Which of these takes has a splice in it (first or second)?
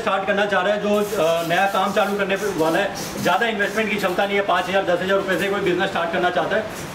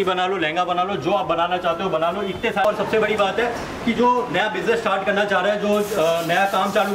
second